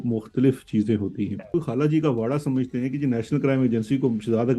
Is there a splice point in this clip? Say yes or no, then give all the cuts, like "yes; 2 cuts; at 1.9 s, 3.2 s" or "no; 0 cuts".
yes; 1 cut; at 1.5 s